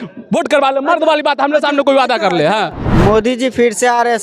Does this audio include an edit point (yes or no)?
yes